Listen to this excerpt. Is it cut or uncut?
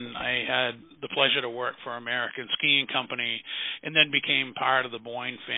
cut